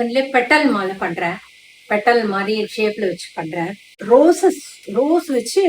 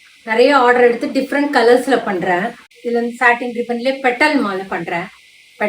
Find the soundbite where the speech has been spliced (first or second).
first